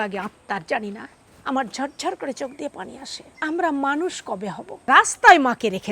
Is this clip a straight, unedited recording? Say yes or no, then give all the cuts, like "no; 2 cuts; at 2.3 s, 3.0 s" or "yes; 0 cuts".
no; 2 cuts; at 3.2 s, 4.8 s